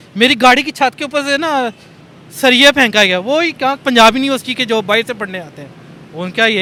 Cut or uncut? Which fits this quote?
uncut